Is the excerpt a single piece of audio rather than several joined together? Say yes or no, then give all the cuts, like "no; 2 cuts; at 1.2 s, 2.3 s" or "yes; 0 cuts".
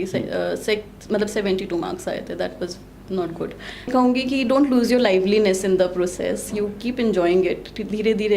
no; 1 cut; at 3.9 s